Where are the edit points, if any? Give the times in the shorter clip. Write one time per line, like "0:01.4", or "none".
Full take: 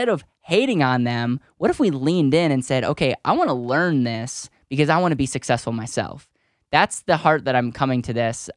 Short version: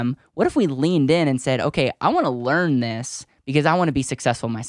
none

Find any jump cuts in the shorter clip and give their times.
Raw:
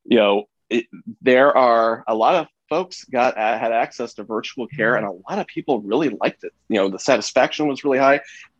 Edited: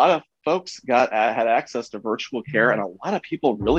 none

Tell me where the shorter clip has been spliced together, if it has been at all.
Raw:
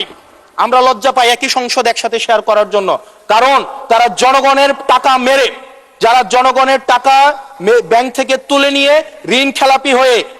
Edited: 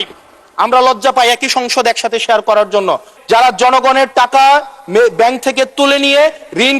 0:03.1

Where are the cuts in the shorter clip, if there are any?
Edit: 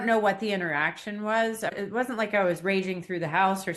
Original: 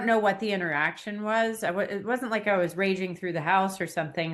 0:01.7

